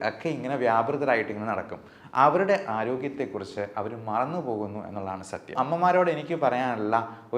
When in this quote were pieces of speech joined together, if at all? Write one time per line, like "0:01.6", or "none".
0:05.5